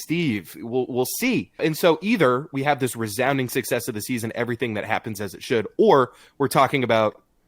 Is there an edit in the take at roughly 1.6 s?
yes; 1 cut; at 1.6 s

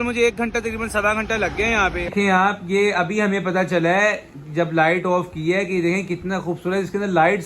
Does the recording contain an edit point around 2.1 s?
yes; 1 cut; at 2.1 s

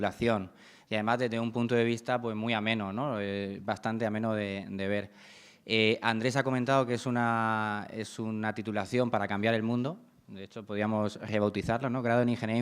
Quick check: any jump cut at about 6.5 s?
no; 1 cut; at 3.3 s

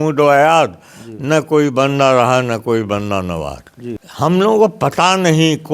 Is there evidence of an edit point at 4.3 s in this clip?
yes; 1 cut; at 4.3 s

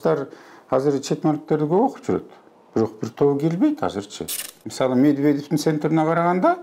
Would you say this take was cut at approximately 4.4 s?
yes; 1 cut; at 4.4 s

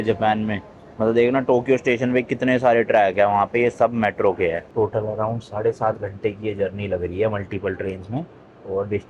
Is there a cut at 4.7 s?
yes; 1 cut; at 4.7 s

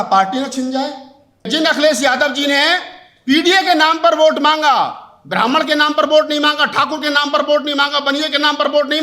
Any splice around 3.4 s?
no; 1 cut; at 1.5 s

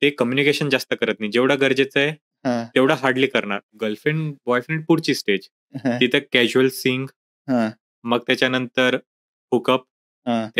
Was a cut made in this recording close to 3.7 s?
yes; 1 cut; at 3.7 s

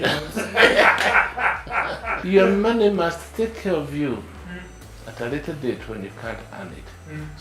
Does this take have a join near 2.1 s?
yes; 1 cut; at 2.1 s

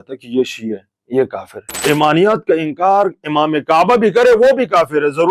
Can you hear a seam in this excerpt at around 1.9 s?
yes; 1 cut; at 1.9 s

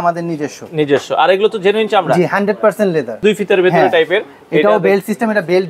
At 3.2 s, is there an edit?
yes; 1 cut; at 3.2 s

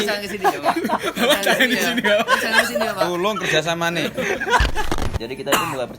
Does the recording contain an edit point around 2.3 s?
no; 1 cut; at 5.0 s

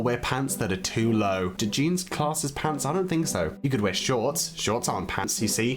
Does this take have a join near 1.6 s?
yes; 1 cut; at 1.6 s

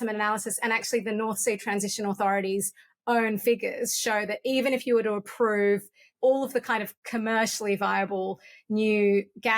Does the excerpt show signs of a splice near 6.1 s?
yes; 1 cut; at 6.1 s

